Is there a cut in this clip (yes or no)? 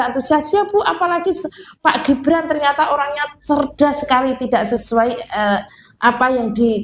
no